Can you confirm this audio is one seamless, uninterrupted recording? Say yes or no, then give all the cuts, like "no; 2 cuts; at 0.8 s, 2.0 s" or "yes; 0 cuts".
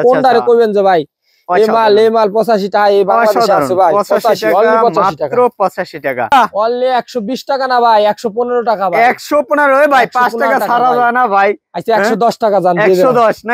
no; 1 cut; at 6.3 s